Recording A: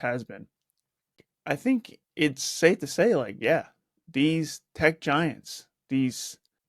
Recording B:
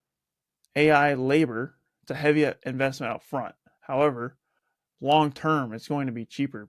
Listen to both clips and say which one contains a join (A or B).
A